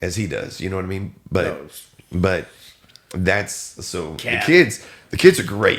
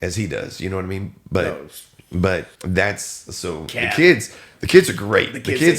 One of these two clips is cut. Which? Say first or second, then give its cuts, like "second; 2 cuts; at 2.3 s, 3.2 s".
second; 1 cut; at 2.5 s